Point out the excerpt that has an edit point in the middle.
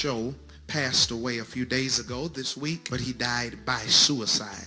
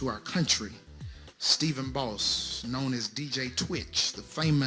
first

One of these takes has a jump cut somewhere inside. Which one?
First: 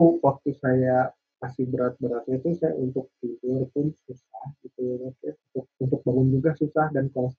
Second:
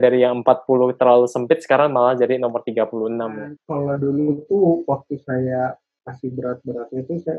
second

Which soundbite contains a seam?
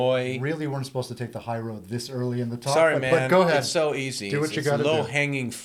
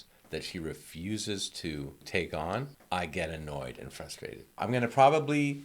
second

